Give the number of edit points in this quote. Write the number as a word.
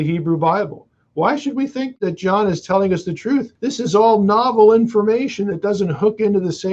two